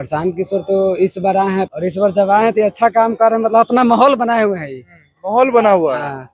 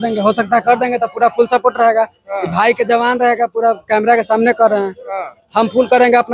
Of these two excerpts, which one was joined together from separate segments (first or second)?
first